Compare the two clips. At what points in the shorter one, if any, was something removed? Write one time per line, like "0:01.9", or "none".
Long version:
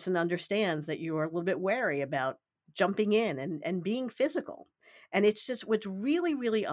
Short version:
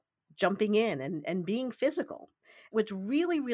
0:02.6